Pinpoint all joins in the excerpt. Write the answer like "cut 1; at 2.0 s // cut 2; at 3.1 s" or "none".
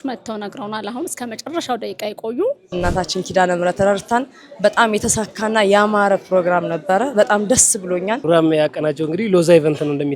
cut 1; at 2.7 s // cut 2; at 8.2 s